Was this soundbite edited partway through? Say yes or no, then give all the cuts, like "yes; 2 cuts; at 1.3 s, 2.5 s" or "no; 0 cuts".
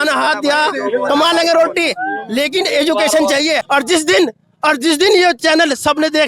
yes; 1 cut; at 3.6 s